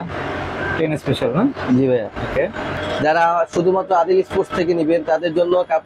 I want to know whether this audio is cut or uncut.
cut